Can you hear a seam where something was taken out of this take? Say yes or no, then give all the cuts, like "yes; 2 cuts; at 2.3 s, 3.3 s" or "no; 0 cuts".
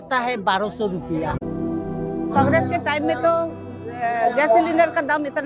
yes; 1 cut; at 1.4 s